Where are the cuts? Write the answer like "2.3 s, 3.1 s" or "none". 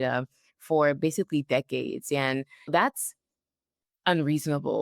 2.7 s